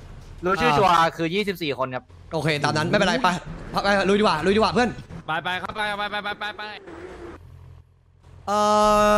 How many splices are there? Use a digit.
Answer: 1